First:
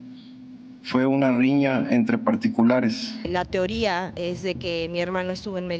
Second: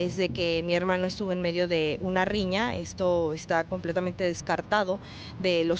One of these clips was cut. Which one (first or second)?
first